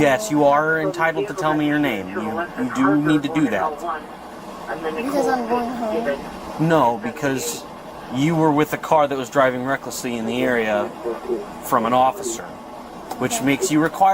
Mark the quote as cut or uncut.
uncut